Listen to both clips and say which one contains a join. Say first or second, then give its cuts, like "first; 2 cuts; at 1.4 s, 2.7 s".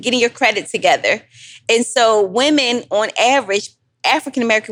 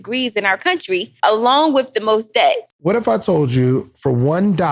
second; 2 cuts; at 1.1 s, 2.6 s